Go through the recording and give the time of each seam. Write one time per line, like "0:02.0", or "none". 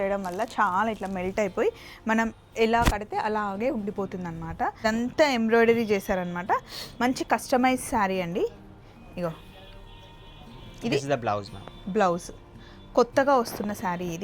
0:04.8